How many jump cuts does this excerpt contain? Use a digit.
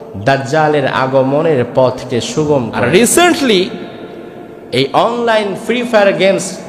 1